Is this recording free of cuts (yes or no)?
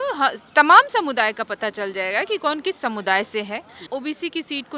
no